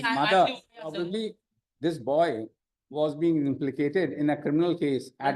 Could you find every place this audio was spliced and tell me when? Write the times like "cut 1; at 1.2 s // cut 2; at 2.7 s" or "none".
cut 1; at 0.9 s